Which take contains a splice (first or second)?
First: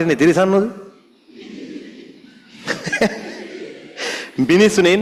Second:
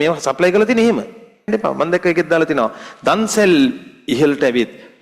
second